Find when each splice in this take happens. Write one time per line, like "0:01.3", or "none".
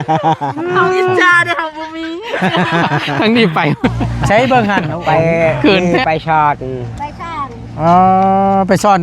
0:06.0

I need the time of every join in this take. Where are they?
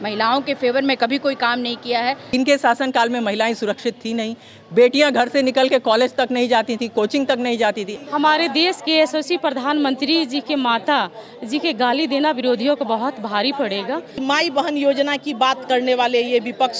0:02.3
0:07.9
0:14.1

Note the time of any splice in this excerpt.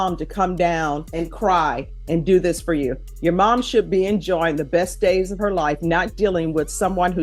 0:01.1

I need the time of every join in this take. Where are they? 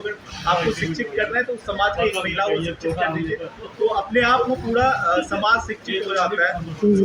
none

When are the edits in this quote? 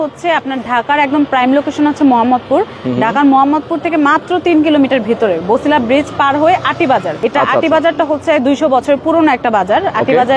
0:07.1

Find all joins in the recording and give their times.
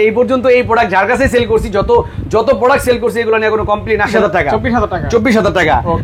0:04.1

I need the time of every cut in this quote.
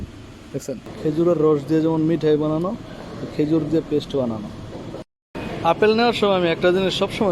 0:00.9
0:05.1

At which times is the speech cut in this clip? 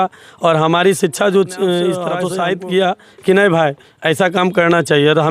0:02.2

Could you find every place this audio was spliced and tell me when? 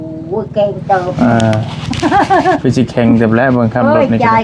none

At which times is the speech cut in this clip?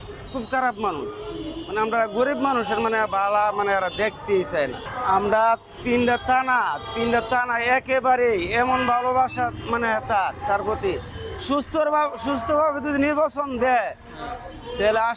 0:04.9

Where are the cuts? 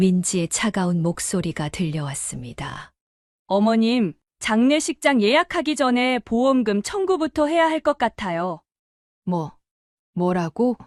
none

